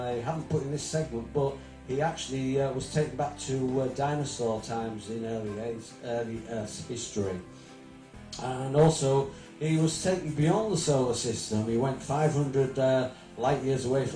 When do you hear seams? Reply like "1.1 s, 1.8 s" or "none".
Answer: 11.0 s